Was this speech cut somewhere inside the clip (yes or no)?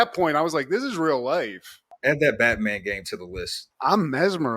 yes